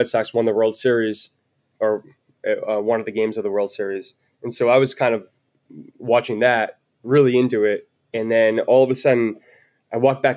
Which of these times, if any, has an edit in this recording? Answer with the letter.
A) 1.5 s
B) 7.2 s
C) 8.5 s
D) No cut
A